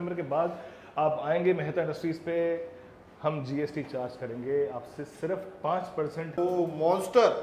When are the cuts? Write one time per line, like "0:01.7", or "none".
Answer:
0:06.4